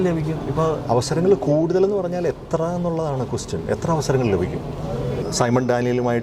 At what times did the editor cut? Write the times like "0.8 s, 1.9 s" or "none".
5.2 s